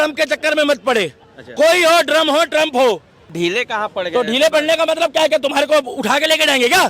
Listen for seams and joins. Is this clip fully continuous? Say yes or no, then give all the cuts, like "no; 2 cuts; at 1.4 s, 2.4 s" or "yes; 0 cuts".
no; 1 cut; at 3.3 s